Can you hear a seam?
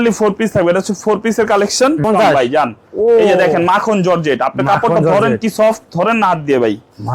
yes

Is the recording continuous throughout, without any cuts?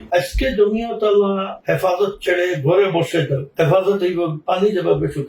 no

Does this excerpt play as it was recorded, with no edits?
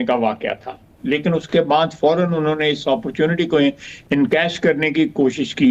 no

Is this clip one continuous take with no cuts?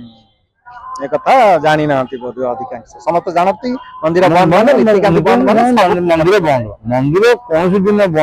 yes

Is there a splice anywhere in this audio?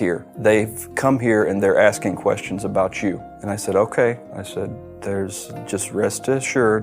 no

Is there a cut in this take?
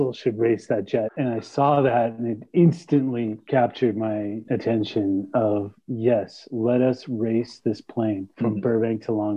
yes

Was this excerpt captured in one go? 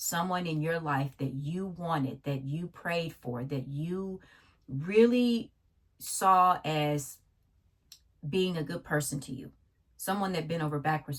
yes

